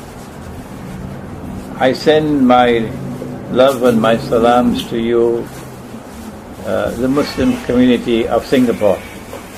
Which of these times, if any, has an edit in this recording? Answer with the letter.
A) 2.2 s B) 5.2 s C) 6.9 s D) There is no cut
D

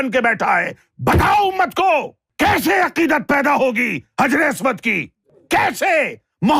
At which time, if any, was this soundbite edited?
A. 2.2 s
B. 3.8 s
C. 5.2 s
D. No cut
A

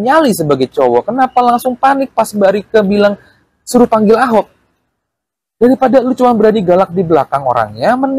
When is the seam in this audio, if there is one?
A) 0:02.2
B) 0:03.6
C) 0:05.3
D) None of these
D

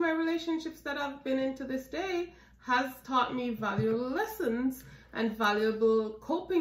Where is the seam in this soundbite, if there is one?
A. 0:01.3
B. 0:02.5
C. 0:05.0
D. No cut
D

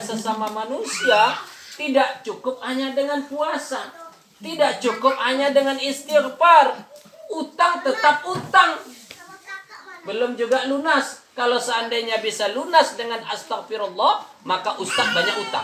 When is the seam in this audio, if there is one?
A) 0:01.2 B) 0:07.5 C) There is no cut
C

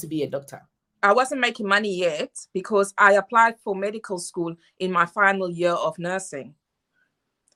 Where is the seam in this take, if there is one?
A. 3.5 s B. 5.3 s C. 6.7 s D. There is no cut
D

